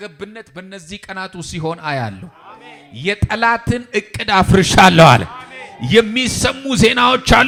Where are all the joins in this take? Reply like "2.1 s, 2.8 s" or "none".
none